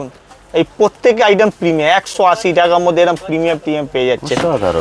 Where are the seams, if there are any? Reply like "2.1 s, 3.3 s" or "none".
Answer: none